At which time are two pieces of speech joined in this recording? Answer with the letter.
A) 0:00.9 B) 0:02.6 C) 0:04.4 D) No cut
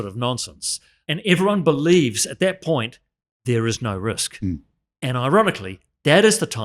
A